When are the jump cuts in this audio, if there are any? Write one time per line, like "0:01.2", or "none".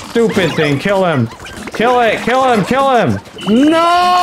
0:03.3